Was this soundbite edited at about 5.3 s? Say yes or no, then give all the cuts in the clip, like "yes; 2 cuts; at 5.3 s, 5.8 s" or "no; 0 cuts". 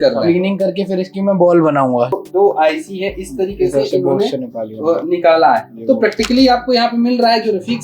no; 1 cut; at 2.1 s